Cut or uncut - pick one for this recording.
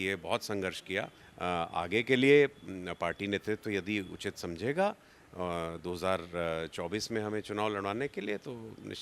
cut